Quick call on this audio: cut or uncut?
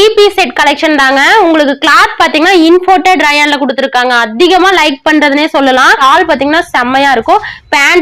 cut